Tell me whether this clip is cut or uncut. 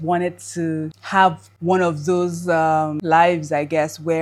uncut